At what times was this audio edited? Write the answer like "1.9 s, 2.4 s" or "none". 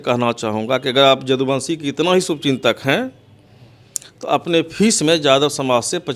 none